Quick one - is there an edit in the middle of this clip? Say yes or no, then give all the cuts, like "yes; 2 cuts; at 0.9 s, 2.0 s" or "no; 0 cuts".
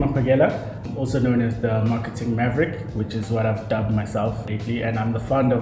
yes; 2 cuts; at 0.9 s, 4.4 s